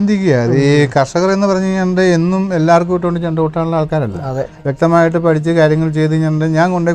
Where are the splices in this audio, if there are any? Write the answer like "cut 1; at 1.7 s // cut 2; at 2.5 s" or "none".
none